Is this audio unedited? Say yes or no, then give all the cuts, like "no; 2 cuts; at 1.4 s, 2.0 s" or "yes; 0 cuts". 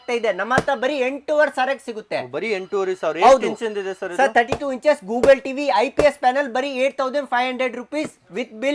yes; 0 cuts